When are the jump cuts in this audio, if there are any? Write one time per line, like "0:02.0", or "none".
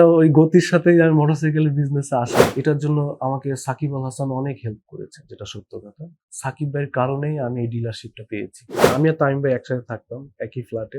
0:02.4
0:08.8